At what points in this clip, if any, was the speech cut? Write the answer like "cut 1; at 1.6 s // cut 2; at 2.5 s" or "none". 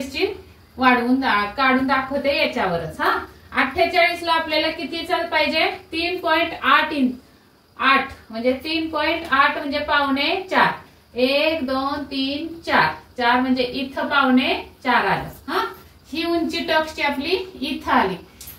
none